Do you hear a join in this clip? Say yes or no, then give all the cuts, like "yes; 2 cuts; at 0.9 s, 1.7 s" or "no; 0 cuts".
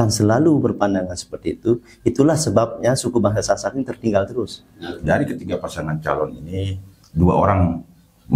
yes; 1 cut; at 5.0 s